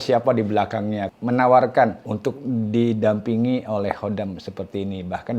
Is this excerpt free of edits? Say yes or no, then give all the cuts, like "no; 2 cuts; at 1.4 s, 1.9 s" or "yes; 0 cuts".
no; 2 cuts; at 1.1 s, 2.1 s